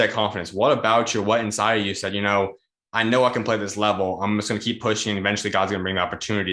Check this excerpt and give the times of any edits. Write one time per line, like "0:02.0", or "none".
none